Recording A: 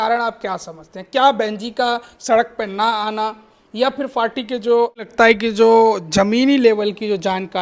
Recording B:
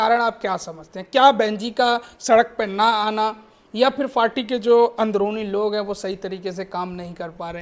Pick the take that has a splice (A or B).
A